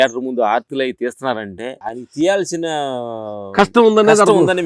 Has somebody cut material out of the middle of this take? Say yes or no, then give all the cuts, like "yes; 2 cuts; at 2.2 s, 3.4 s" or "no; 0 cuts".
yes; 1 cut; at 1.8 s